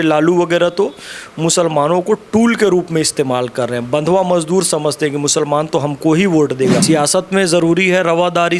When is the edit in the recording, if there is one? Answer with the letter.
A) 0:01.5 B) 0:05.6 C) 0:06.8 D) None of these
C